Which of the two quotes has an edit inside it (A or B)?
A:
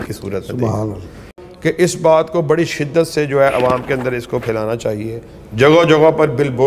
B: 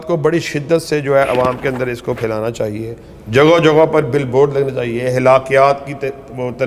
A